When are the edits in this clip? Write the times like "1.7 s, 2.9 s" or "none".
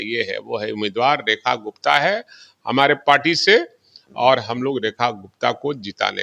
none

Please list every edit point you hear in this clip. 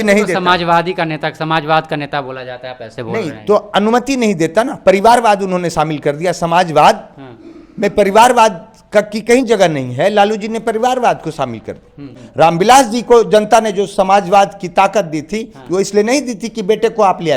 12.2 s

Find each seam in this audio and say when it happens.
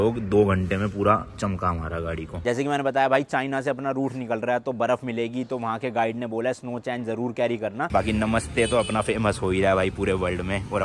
2.4 s, 7.9 s

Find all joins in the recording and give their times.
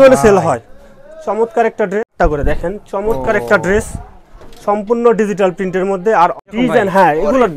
2.1 s, 6.3 s

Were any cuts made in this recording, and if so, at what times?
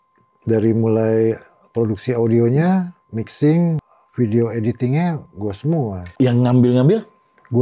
3.9 s, 6.0 s

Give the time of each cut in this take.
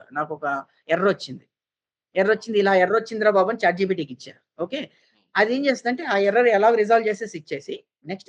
none

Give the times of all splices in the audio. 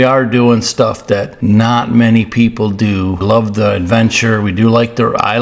1.3 s, 3.2 s

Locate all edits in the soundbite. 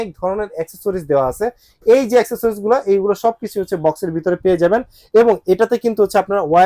none

